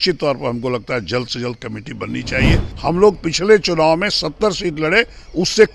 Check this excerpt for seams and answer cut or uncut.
cut